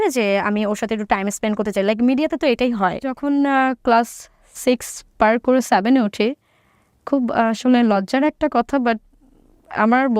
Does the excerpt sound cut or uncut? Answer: cut